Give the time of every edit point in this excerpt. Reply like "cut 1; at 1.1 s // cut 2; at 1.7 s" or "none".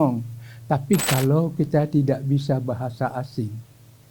cut 1; at 1.1 s

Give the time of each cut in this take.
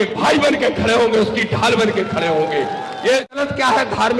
cut 1; at 3.3 s

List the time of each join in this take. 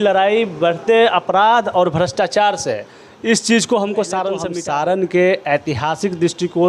cut 1; at 4.5 s

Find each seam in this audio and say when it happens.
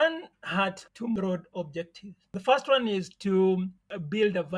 cut 1; at 1.0 s

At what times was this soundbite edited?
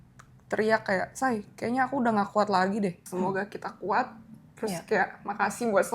cut 1; at 3.0 s

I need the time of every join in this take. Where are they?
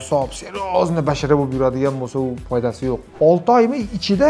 cut 1; at 3.1 s

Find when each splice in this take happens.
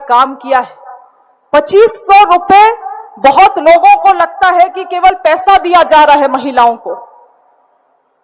none

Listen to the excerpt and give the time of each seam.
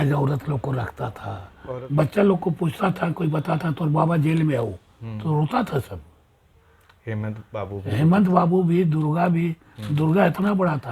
cut 1; at 1.5 s

